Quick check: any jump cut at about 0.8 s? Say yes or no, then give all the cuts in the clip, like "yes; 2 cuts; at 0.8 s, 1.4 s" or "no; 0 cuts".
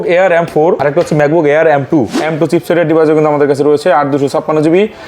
yes; 2 cuts; at 0.8 s, 2.2 s